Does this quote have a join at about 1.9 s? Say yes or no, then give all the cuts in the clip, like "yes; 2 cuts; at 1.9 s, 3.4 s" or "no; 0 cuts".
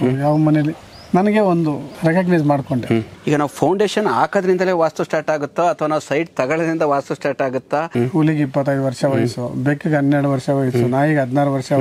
yes; 3 cuts; at 1.9 s, 3.1 s, 7.9 s